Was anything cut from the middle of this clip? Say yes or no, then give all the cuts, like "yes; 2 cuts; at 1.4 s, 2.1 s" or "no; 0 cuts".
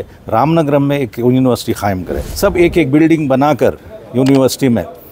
yes; 1 cut; at 2.2 s